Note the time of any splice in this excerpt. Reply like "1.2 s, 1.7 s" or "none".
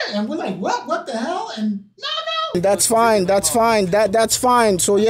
2.6 s